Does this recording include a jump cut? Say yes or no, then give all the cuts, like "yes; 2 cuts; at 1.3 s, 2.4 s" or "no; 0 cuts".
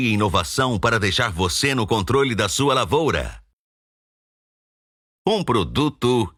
no; 0 cuts